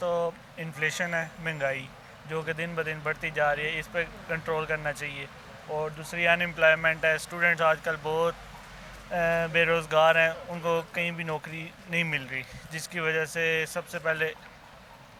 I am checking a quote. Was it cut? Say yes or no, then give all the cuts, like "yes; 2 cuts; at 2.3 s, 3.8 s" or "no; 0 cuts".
no; 0 cuts